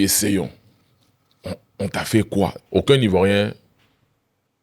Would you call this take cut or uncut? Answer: cut